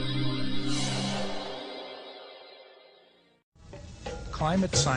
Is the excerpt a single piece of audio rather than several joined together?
yes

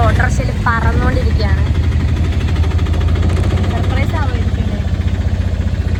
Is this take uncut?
yes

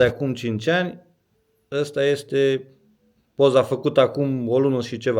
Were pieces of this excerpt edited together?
no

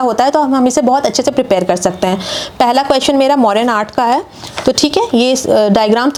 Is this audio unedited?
yes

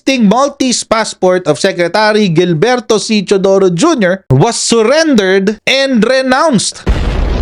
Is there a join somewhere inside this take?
no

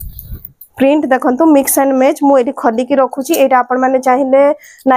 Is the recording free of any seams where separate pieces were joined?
yes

